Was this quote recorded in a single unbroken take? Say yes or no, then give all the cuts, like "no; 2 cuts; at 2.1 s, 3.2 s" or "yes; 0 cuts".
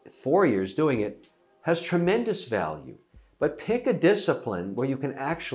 yes; 0 cuts